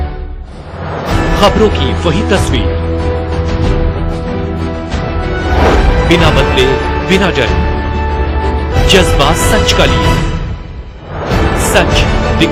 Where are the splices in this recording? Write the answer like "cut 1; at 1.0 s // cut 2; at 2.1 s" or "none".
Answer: none